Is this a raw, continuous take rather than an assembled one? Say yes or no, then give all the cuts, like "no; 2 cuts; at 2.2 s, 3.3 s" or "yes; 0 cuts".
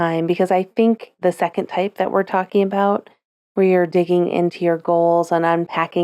no; 1 cut; at 1.1 s